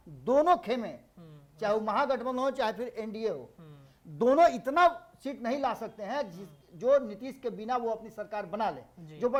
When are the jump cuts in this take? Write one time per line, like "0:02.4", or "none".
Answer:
none